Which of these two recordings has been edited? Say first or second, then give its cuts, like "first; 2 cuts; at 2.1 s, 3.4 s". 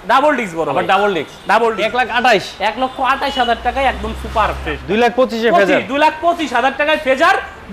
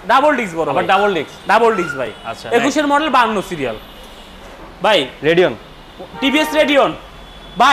first; 2 cuts; at 1.8 s, 4.8 s